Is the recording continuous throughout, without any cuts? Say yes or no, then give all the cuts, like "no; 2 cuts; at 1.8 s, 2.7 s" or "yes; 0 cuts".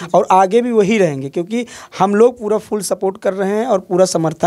yes; 0 cuts